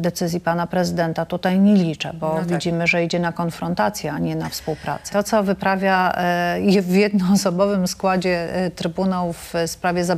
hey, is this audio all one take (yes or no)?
no